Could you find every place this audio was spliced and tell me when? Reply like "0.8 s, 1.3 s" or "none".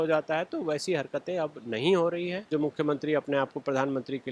2.5 s